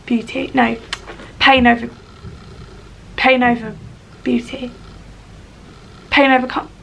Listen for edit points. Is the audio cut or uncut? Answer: uncut